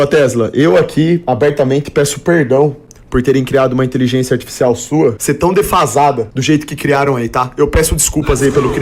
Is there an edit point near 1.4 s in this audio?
no; 2 cuts; at 5.2 s, 6.3 s

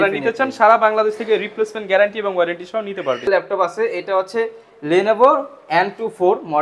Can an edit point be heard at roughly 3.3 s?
yes; 1 cut; at 3.3 s

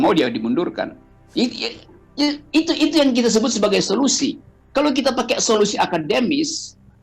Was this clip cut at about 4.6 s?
no; 0 cuts

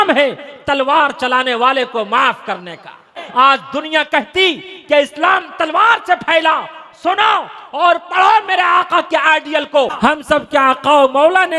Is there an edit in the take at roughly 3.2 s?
yes; 2 cuts; at 3.2 s, 9.9 s

